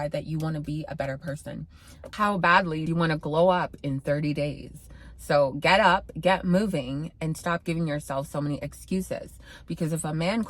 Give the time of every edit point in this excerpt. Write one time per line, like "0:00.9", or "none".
0:02.1